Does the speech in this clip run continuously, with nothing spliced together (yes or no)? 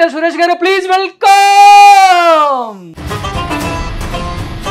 no